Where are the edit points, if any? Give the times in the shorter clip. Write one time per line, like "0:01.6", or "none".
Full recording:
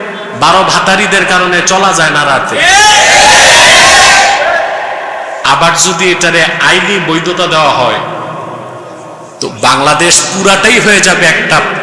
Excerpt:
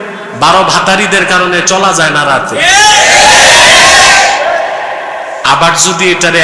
none